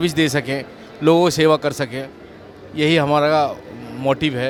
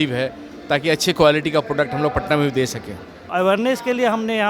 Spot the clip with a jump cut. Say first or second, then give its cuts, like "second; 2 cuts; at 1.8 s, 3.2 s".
second; 1 cut; at 3.3 s